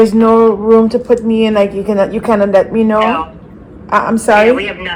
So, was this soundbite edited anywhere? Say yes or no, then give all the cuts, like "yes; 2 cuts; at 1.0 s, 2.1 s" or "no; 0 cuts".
no; 0 cuts